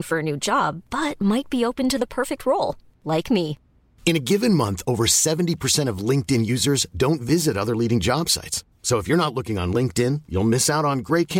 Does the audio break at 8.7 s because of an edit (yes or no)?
no